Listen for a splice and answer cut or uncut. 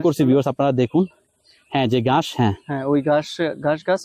uncut